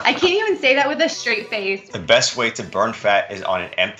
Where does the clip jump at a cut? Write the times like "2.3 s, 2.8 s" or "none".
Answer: 1.9 s